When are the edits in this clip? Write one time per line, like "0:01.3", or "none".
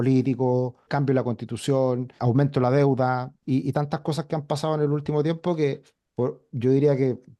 0:00.8
0:02.1
0:03.3